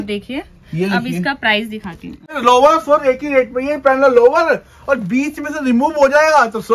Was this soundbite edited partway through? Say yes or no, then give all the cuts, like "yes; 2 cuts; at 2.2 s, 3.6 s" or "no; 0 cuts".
yes; 1 cut; at 2.3 s